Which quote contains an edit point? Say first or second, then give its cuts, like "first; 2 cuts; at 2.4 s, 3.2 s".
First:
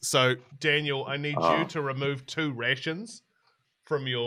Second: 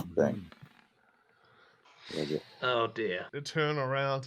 second; 1 cut; at 3.3 s